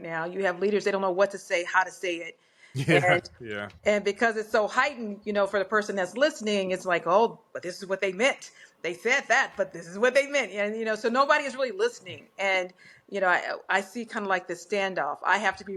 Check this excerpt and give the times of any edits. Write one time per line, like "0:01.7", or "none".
none